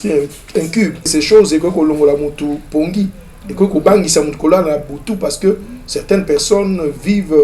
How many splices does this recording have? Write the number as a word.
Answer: one